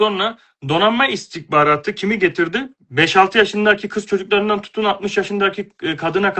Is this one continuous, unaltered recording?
no; 1 cut; at 2.7 s

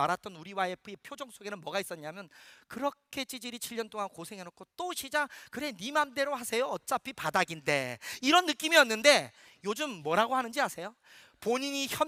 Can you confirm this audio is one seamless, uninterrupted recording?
yes; 0 cuts

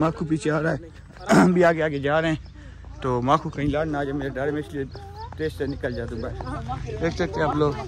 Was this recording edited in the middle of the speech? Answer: no; 0 cuts

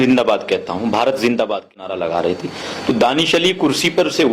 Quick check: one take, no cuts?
no; 1 cut; at 1.9 s

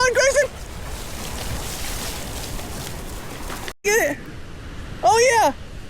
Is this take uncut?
no; 1 cut; at 3.8 s

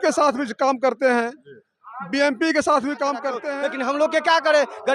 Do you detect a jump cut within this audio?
yes; 1 cut; at 3.4 s

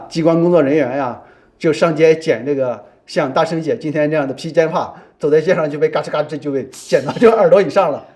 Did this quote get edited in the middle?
no; 0 cuts

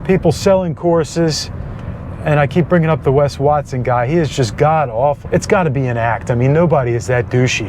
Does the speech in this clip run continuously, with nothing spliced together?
no; 1 cut; at 5.2 s

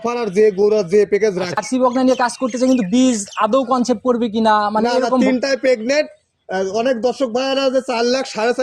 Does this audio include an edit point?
yes; 1 cut; at 1.6 s

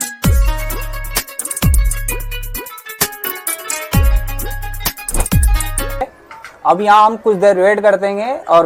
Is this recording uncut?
no; 1 cut; at 6.0 s

